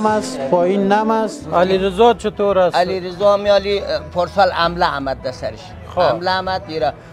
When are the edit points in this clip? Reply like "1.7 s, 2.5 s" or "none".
1.4 s